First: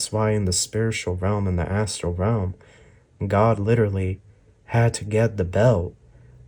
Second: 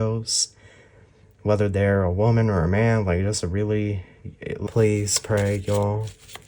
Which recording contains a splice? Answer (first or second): second